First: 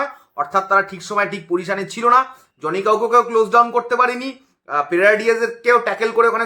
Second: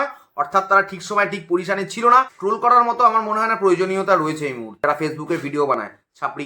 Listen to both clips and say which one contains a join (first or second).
second